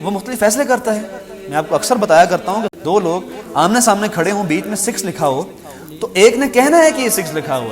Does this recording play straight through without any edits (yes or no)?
no